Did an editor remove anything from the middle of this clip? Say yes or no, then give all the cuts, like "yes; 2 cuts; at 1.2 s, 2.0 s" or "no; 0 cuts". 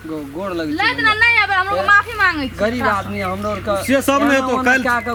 no; 0 cuts